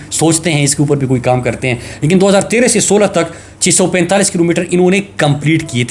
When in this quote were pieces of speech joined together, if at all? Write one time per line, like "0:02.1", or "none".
none